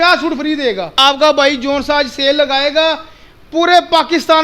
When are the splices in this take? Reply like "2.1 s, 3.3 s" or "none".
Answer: 0.9 s

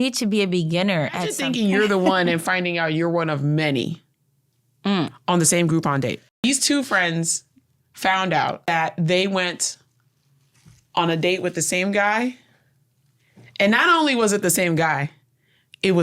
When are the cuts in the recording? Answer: 1.4 s, 6.4 s, 8.7 s

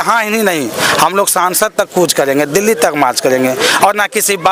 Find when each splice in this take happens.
none

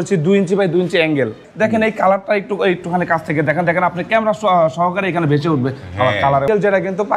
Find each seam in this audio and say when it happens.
1.4 s, 6.5 s

